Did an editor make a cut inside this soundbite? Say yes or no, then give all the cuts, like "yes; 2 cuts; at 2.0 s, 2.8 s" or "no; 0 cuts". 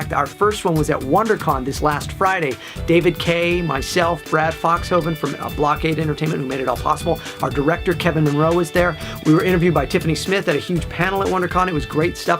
yes; 1 cut; at 10.0 s